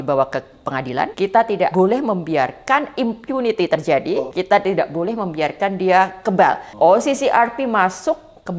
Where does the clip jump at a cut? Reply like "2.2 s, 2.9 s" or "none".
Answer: 1.6 s, 4.2 s, 6.7 s